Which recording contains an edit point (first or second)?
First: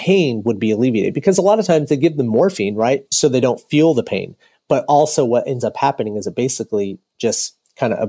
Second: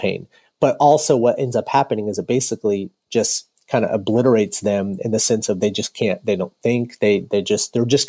first